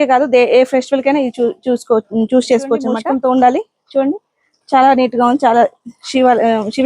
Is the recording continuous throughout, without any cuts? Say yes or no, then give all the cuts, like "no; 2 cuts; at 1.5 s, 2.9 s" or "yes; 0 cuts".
no; 1 cut; at 2.9 s